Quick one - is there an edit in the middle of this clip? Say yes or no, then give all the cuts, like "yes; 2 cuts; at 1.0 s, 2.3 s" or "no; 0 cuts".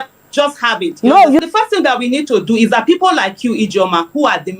yes; 1 cut; at 1.4 s